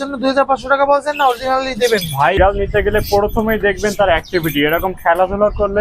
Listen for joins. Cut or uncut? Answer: cut